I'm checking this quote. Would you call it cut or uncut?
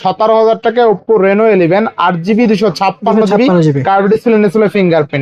uncut